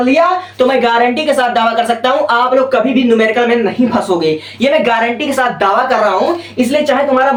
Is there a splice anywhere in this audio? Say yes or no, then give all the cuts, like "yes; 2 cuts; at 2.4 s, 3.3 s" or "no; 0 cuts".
no; 0 cuts